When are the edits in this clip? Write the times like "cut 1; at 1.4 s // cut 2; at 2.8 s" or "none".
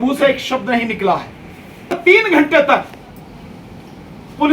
cut 1; at 2.0 s